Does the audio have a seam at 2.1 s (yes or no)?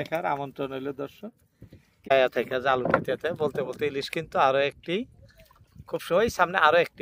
yes